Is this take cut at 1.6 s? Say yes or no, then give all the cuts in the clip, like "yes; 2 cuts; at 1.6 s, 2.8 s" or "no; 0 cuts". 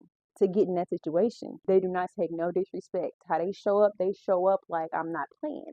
yes; 1 cut; at 1.6 s